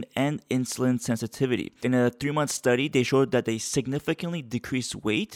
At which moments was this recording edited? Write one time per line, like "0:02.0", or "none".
0:01.7